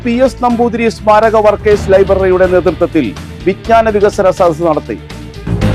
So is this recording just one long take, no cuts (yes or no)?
yes